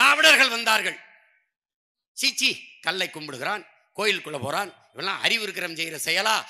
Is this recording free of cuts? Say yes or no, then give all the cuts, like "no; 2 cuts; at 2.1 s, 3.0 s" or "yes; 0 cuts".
yes; 0 cuts